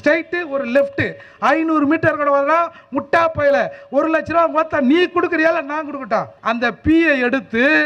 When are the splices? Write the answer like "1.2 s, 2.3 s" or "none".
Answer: 6.3 s